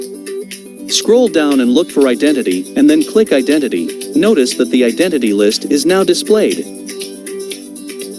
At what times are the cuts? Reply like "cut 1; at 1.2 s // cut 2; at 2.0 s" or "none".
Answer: cut 1; at 1.1 s // cut 2; at 4.0 s // cut 3; at 6.6 s